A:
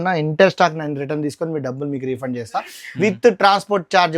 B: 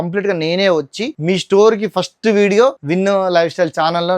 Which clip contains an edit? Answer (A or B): B